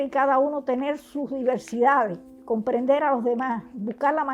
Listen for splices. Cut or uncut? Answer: cut